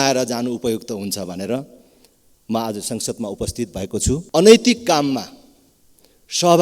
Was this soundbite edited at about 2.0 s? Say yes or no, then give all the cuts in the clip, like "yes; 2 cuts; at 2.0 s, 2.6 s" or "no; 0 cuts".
no; 1 cut; at 4.2 s